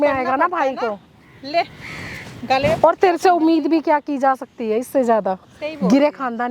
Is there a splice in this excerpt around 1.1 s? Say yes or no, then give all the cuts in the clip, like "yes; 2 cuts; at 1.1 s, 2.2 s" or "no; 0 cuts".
no; 0 cuts